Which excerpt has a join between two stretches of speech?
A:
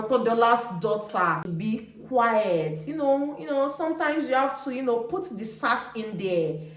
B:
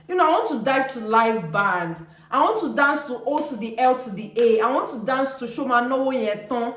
A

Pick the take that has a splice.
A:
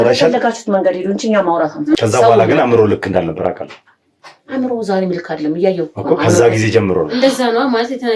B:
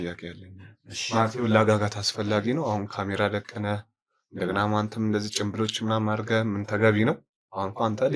A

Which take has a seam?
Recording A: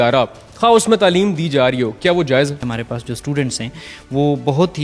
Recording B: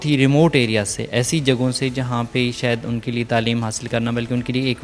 A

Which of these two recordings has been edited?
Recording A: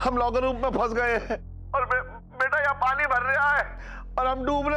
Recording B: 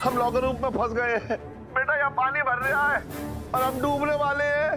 B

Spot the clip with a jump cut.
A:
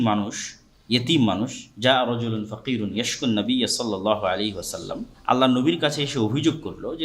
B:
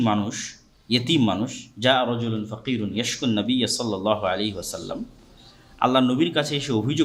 A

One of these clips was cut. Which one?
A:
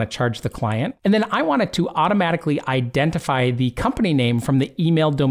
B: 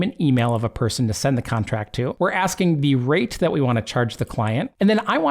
B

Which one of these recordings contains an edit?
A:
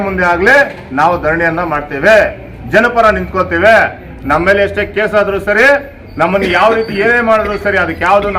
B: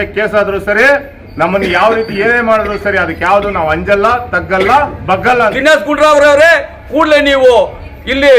B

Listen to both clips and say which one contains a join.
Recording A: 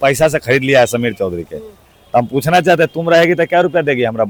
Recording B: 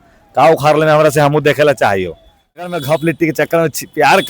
B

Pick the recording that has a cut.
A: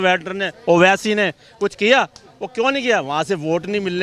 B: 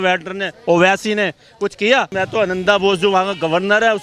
B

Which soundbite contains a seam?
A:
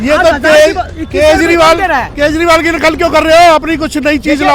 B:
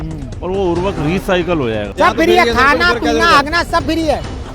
B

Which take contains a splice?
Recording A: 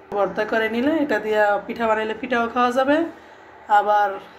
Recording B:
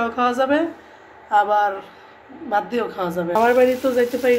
B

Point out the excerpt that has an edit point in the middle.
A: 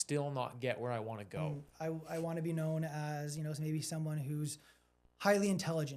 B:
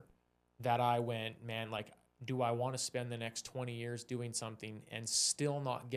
A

